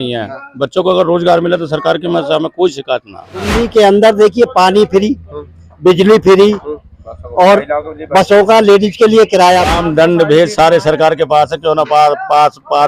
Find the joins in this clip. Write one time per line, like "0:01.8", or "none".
0:03.5
0:09.7